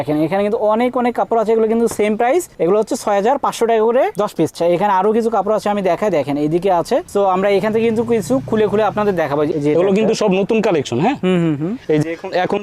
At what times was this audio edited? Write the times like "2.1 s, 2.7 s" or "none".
4.5 s, 9.5 s

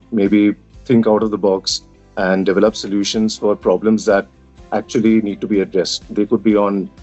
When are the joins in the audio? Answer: none

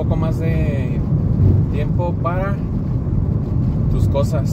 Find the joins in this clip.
none

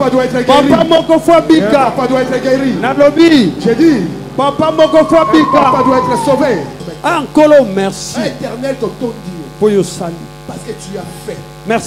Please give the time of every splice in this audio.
6.9 s

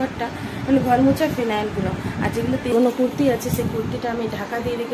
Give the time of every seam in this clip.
2.7 s

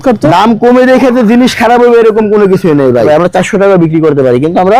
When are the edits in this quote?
3.1 s

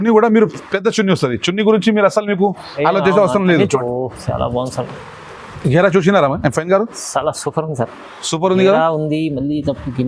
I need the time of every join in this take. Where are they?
3.7 s

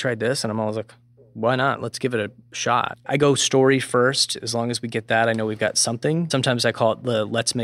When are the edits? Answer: 3.0 s, 6.3 s

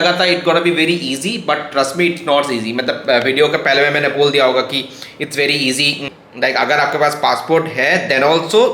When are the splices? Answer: 6.0 s

